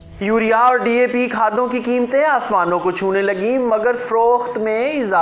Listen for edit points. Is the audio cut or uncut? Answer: uncut